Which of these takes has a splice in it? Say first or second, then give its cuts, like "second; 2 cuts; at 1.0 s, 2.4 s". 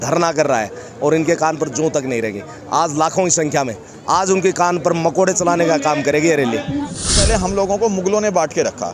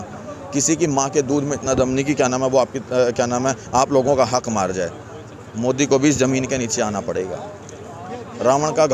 first; 1 cut; at 7.2 s